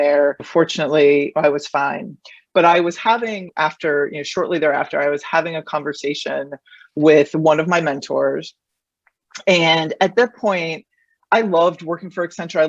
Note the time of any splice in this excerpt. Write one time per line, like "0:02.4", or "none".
none